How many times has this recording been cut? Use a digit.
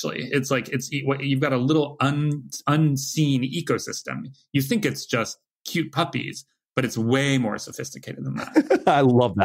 1